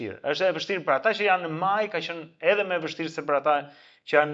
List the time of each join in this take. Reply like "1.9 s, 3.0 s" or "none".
none